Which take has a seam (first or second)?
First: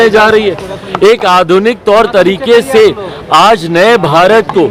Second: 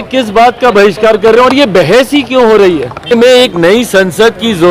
second